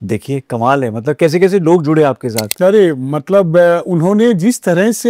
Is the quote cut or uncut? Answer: uncut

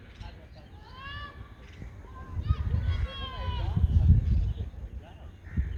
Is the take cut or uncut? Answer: uncut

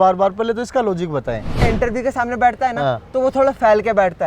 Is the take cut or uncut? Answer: cut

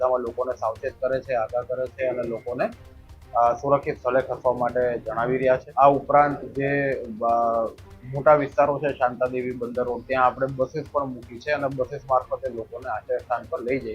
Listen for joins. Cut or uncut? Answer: cut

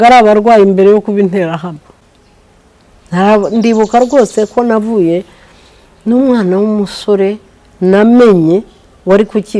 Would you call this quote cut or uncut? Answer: uncut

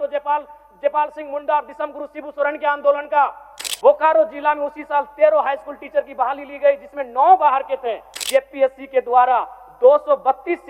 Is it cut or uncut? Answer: cut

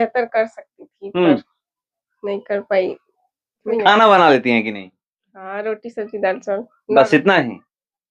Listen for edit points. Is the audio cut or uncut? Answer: cut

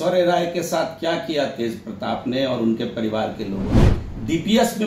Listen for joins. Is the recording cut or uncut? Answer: cut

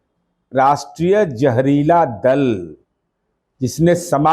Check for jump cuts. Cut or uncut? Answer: uncut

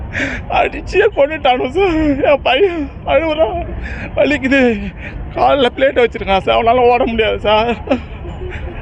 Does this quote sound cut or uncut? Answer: uncut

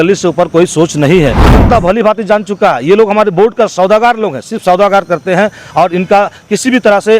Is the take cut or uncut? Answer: cut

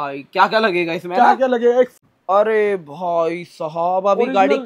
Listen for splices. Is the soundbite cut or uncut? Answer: cut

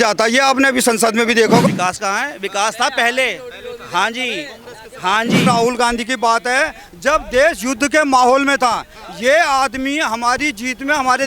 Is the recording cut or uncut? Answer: cut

